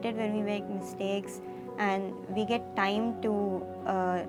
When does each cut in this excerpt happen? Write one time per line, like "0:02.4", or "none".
none